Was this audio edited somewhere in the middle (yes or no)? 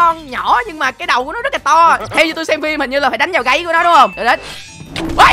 yes